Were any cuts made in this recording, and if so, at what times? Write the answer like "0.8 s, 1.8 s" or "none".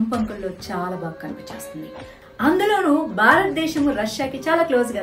2.3 s